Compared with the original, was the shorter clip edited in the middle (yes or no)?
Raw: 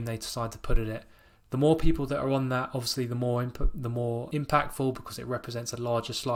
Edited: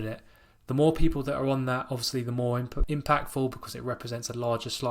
yes